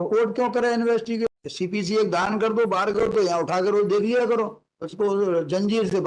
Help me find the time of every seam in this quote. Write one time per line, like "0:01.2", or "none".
0:01.3